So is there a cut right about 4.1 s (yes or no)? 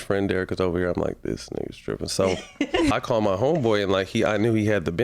no